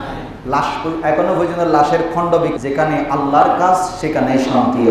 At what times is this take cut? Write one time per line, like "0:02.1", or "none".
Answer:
0:02.5